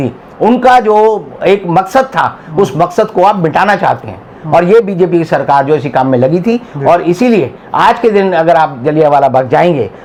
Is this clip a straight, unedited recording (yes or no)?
yes